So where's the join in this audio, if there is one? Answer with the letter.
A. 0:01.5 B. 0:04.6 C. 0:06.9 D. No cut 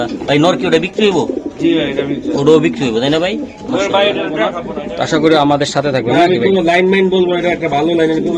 B